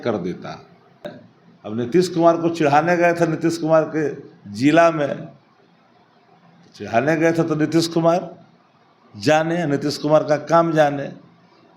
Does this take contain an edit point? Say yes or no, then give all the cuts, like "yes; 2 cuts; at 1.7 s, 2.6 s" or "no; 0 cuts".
yes; 1 cut; at 1.1 s